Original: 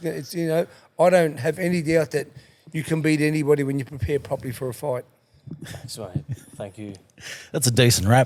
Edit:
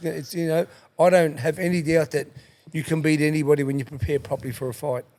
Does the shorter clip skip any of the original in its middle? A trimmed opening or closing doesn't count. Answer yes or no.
no